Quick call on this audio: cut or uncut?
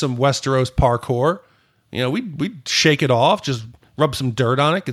uncut